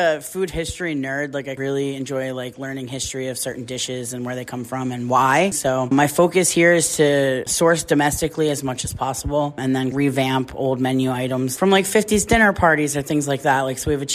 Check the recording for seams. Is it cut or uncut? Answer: cut